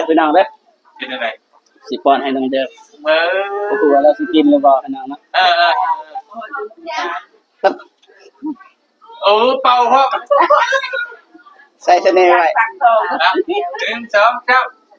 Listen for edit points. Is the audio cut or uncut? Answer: uncut